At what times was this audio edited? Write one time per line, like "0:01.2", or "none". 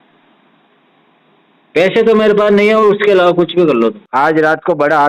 0:04.0